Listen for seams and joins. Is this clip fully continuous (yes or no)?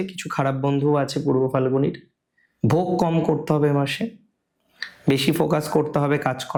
yes